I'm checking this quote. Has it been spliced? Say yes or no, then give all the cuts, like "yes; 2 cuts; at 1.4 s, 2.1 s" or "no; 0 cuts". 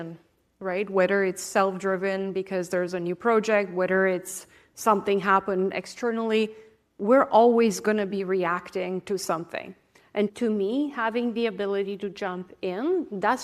no; 0 cuts